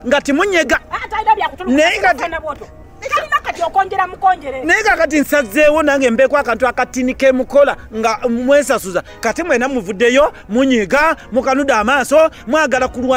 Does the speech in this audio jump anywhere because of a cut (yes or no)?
no